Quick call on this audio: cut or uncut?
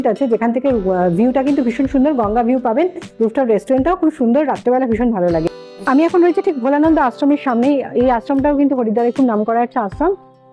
uncut